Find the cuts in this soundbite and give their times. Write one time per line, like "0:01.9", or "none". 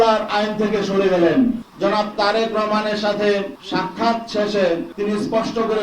0:01.7
0:03.6
0:04.9